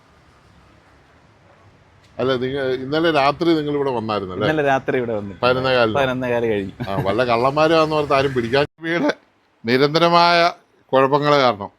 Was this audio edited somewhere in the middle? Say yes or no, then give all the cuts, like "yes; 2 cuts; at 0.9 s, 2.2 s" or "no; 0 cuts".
yes; 1 cut; at 8.7 s